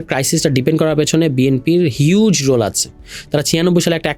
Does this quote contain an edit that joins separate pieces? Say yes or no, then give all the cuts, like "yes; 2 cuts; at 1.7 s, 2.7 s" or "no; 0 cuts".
no; 0 cuts